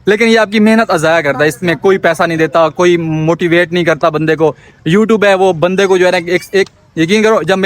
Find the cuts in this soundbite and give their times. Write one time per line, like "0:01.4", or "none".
none